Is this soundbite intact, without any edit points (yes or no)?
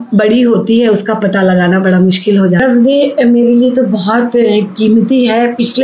no